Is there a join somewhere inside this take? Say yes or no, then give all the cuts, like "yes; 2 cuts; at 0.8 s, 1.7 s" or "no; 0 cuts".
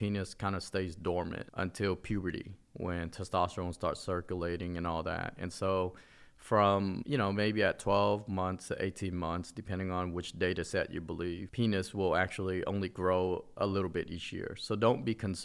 yes; 1 cut; at 11.5 s